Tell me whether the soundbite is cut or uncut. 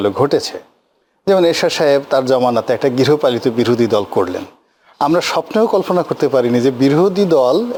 uncut